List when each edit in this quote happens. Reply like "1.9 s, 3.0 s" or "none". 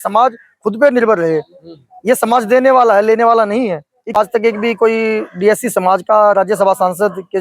4.1 s